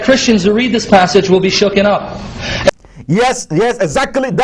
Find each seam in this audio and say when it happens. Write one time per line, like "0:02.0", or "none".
none